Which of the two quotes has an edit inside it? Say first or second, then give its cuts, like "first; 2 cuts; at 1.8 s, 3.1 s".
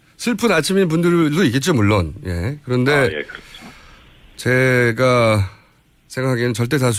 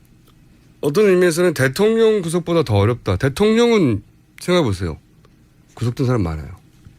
second; 1 cut; at 3.2 s